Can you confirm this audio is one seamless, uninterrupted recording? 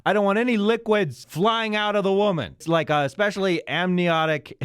no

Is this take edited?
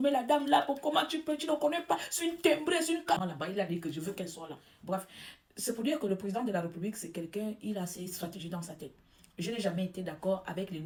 no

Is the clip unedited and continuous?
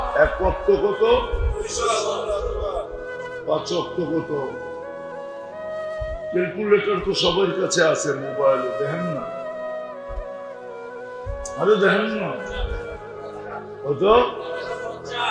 no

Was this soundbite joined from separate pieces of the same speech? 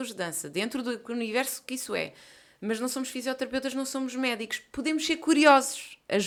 no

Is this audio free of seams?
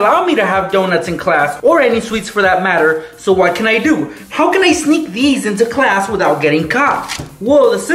yes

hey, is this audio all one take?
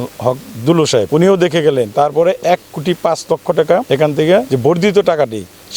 no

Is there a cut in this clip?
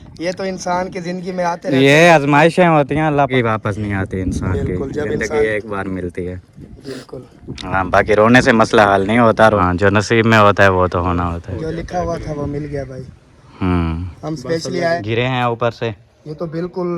yes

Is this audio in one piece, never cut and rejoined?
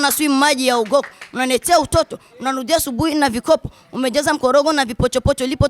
yes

